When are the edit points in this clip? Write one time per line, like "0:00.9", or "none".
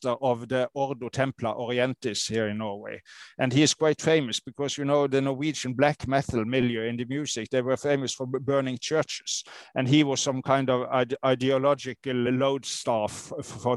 0:12.3